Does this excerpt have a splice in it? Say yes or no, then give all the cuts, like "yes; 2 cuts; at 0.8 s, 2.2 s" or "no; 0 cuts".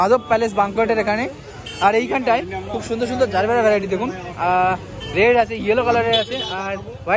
no; 0 cuts